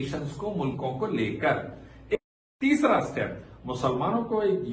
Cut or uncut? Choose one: cut